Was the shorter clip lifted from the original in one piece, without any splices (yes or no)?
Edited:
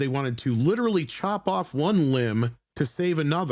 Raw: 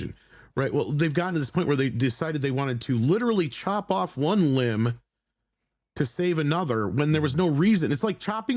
no